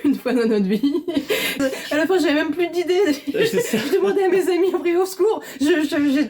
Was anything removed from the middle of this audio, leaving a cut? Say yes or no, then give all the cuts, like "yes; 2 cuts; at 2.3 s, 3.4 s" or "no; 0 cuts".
yes; 1 cut; at 1.6 s